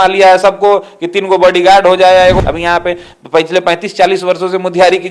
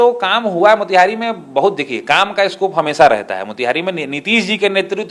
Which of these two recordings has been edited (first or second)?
first